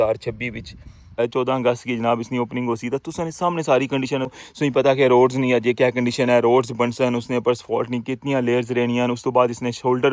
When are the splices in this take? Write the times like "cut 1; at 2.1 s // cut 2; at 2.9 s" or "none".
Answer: cut 1; at 1.2 s // cut 2; at 4.4 s

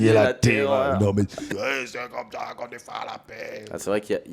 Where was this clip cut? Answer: cut 1; at 1.5 s

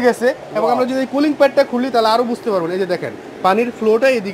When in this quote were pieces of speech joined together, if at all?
none

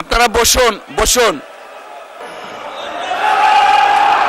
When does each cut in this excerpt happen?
cut 1; at 2.2 s

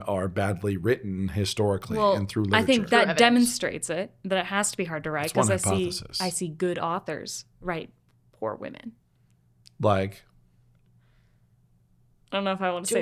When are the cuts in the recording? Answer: none

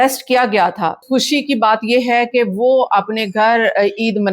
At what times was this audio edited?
cut 1; at 1.0 s

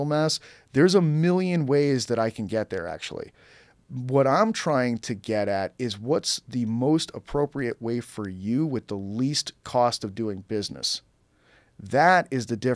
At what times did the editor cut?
none

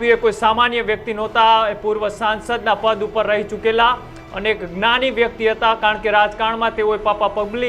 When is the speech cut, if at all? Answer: none

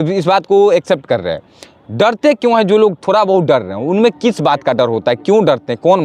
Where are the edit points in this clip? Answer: none

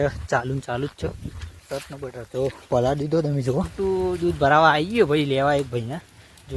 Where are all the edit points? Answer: cut 1; at 3.7 s

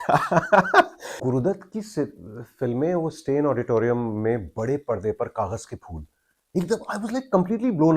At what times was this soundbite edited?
cut 1; at 1.2 s

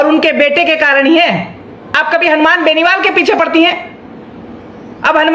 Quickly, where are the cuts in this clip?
cut 1; at 2.2 s

